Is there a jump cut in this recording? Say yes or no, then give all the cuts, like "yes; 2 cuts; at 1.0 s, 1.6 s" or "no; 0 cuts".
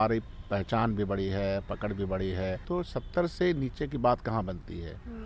yes; 1 cut; at 2.6 s